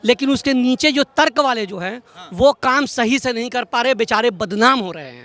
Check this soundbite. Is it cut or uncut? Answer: uncut